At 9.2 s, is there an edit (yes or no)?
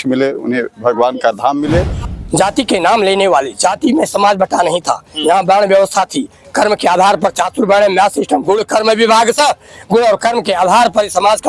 no